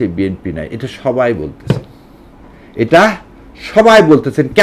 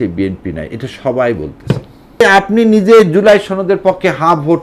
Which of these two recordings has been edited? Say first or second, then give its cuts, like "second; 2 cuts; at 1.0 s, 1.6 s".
second; 1 cut; at 2.2 s